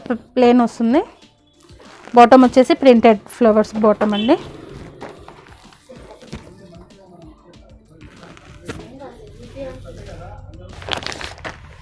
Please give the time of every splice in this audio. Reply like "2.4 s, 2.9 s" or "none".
10.7 s